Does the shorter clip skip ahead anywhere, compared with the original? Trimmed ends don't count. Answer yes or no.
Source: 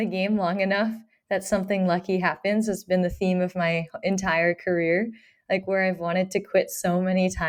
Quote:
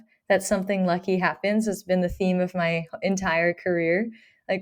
no